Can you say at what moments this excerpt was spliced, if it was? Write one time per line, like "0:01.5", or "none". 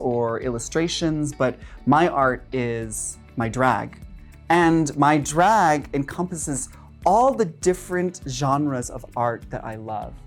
none